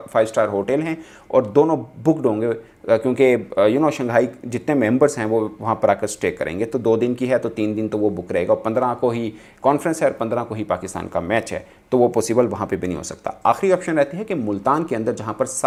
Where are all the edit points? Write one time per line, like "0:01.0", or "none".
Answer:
none